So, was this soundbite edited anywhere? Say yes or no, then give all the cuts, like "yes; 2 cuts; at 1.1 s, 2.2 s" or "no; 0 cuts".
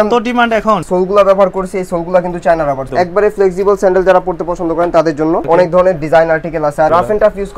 yes; 4 cuts; at 0.9 s, 2.8 s, 5.4 s, 6.9 s